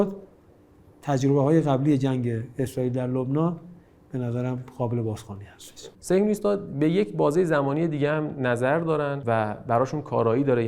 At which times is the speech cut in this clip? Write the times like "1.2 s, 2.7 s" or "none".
5.9 s, 9.2 s